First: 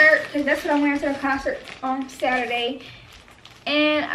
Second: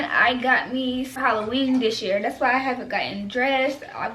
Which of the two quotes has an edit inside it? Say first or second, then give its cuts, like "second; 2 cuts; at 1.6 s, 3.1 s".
second; 1 cut; at 1.1 s